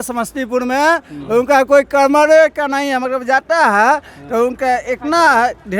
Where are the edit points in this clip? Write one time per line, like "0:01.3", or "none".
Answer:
none